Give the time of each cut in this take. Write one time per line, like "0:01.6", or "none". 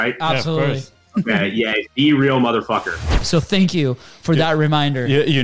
0:03.2

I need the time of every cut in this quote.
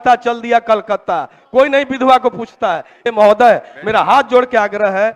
0:02.9

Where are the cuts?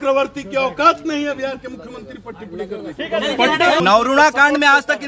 0:03.8

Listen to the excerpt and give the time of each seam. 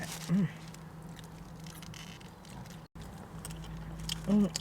0:02.9

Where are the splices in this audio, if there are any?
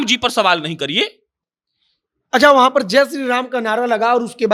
none

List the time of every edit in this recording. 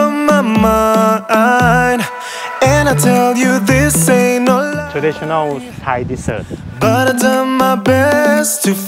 none

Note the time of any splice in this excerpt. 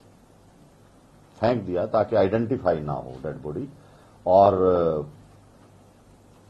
none

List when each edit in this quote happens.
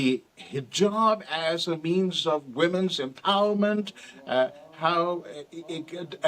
none

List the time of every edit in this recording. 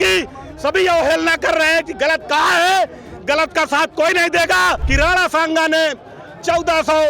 0:04.8

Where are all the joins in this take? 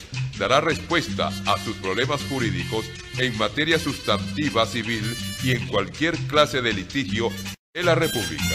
0:07.5

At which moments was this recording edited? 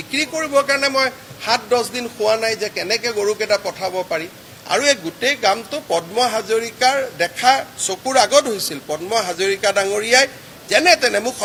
none

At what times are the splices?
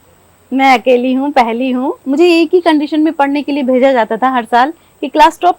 0:02.0

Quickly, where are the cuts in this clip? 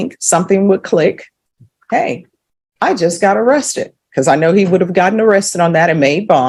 none

